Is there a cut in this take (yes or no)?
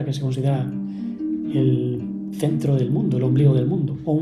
no